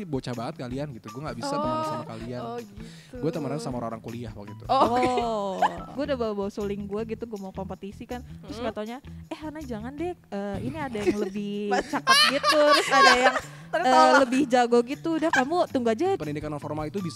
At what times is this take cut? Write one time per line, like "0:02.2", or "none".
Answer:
0:05.9
0:16.2